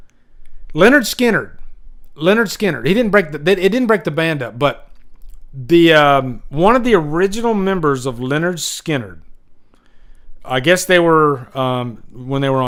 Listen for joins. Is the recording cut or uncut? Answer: uncut